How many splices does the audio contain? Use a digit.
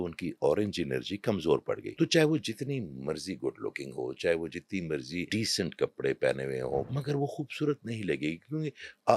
3